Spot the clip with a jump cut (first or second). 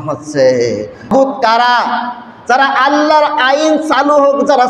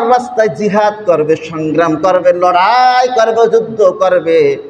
first